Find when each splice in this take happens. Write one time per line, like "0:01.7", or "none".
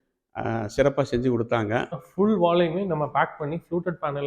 0:02.0